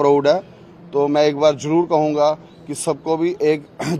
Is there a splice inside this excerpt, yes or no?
no